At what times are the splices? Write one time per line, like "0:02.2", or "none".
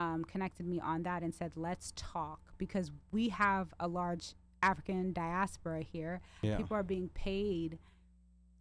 0:06.4